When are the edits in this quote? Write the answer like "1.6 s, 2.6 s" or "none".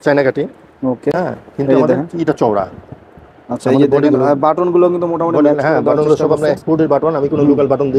none